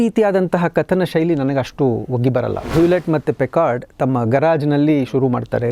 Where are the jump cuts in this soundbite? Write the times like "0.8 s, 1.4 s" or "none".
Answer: 2.7 s